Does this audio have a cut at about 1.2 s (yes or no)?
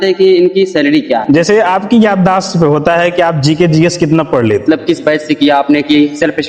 yes